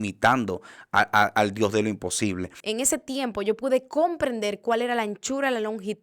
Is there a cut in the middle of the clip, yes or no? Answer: yes